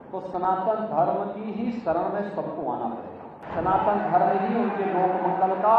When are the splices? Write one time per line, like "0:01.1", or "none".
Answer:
0:03.4